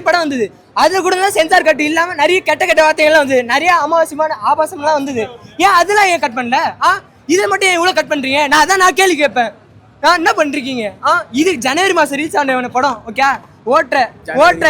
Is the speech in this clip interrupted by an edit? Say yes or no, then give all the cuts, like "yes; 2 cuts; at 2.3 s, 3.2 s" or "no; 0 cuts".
no; 0 cuts